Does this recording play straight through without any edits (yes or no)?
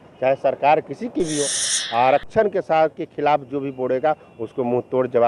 no